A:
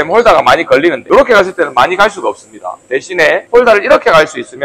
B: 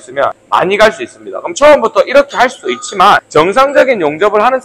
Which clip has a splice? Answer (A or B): A